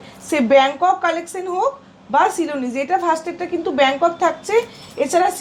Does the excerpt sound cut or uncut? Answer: uncut